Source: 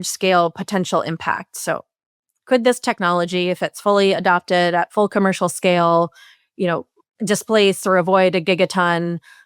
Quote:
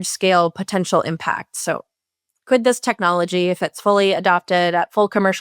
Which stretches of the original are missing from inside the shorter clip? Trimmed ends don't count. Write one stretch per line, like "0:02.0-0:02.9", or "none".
none